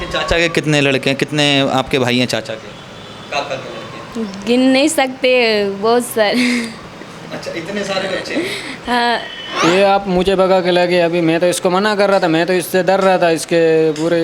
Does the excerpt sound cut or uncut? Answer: cut